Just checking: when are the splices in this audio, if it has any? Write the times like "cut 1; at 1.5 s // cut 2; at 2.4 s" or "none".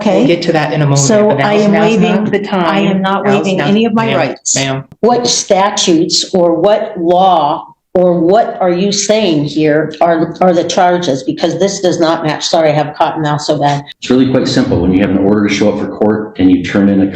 cut 1; at 4.8 s // cut 2; at 13.9 s